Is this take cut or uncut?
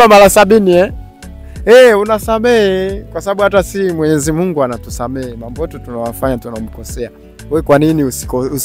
uncut